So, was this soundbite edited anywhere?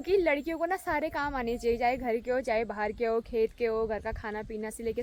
no; 0 cuts

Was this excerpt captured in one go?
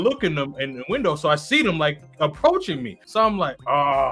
no; 1 cut; at 2.9 s

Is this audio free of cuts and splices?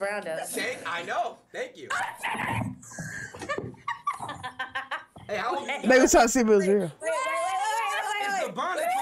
yes; 0 cuts

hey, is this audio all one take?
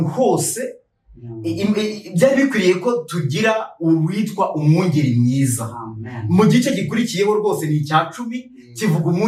yes; 0 cuts

